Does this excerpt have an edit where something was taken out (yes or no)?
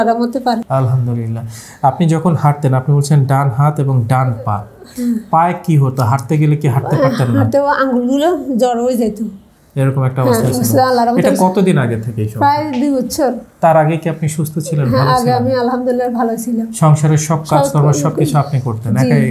no